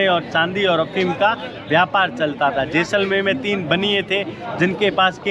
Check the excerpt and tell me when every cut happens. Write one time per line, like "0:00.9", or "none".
none

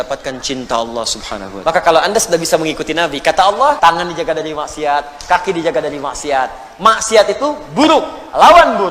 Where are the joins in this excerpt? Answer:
0:01.4
0:03.8

